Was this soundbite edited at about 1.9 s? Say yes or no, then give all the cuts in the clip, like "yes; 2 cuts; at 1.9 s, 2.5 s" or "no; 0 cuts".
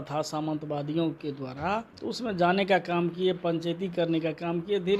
yes; 1 cut; at 1.9 s